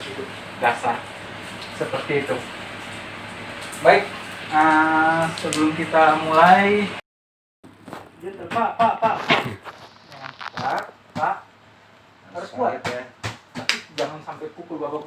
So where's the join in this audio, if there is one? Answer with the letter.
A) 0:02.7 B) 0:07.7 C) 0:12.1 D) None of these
B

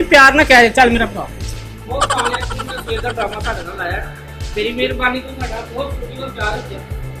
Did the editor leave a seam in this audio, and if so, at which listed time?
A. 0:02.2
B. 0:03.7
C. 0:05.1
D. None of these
D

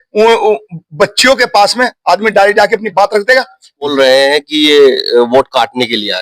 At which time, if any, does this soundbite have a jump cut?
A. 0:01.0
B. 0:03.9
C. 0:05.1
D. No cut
B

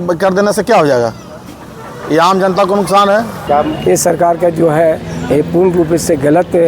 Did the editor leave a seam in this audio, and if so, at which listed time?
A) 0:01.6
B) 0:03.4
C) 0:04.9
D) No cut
B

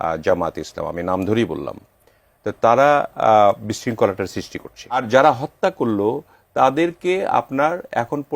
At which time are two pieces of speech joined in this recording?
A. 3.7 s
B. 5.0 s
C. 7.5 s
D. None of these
B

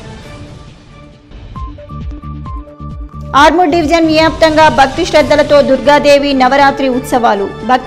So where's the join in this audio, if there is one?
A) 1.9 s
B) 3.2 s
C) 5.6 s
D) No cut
B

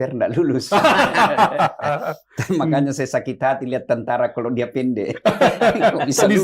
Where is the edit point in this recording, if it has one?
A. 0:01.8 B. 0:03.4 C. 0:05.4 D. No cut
D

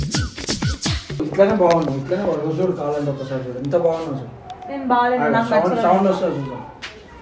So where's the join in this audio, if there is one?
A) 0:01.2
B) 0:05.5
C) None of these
A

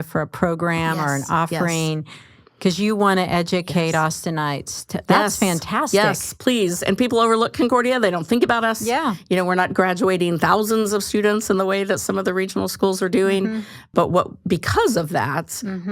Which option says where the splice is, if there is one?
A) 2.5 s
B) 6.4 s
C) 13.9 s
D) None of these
C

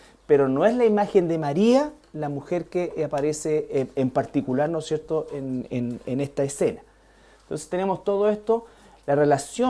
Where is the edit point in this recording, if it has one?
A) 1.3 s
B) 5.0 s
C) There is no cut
B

